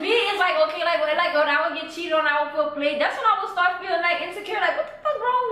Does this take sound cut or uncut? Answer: uncut